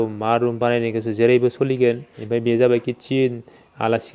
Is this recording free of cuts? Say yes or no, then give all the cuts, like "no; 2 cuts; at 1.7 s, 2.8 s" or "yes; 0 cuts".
no; 1 cut; at 2.1 s